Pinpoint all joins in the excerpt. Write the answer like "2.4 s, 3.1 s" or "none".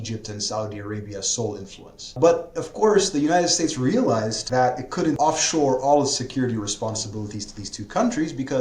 2.2 s, 4.4 s, 5.2 s